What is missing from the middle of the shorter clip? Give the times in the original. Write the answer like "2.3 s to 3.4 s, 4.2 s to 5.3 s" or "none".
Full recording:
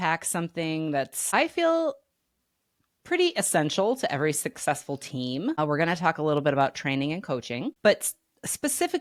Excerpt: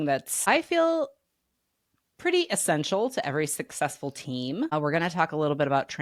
none